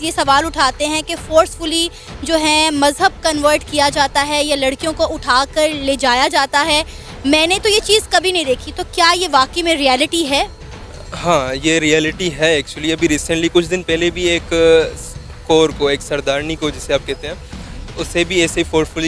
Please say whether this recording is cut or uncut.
uncut